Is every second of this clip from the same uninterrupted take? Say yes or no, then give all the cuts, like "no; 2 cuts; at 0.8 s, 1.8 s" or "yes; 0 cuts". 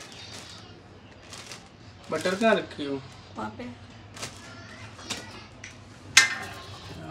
yes; 0 cuts